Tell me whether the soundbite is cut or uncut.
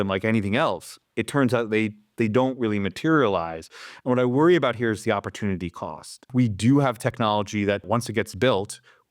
cut